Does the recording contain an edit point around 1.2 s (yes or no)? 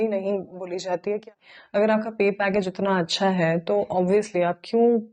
yes